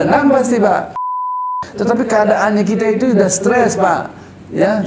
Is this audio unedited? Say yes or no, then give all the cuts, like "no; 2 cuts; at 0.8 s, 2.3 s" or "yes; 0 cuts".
no; 1 cut; at 1.4 s